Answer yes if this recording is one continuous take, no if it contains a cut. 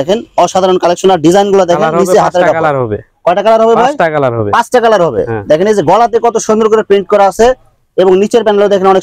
yes